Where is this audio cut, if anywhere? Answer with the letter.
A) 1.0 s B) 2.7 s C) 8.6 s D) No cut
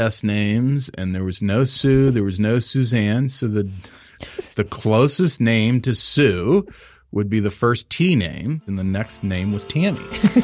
C